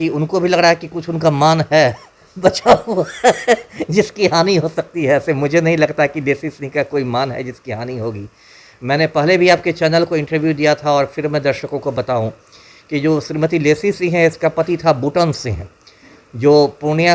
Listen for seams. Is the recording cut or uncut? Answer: uncut